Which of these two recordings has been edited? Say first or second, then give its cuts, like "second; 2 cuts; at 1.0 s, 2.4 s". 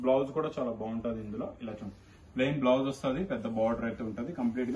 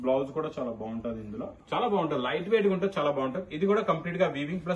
second; 1 cut; at 1.6 s